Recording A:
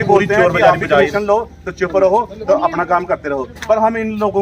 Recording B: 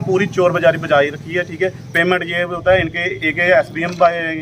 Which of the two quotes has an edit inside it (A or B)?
A